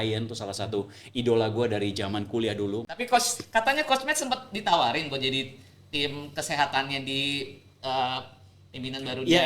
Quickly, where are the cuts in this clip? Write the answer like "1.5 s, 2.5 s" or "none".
2.9 s